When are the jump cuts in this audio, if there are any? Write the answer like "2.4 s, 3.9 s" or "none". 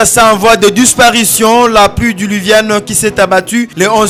none